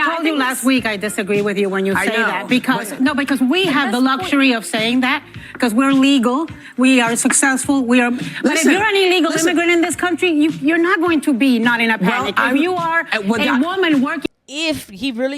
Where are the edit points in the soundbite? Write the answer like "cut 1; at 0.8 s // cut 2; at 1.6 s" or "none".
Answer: cut 1; at 14.2 s

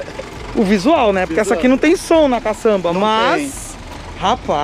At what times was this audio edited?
none

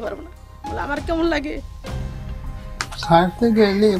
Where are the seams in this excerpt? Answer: cut 1; at 1.7 s // cut 2; at 2.9 s

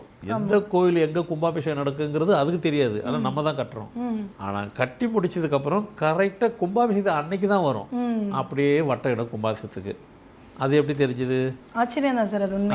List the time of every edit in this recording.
cut 1; at 4.3 s // cut 2; at 11.6 s

